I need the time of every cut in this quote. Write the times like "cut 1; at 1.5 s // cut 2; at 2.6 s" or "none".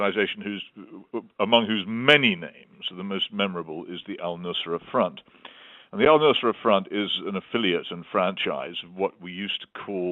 cut 1; at 8.3 s